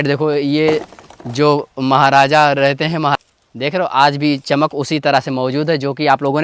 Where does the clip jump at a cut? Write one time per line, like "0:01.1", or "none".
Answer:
0:03.2